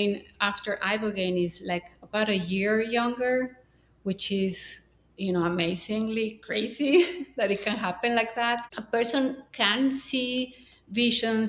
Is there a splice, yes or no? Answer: yes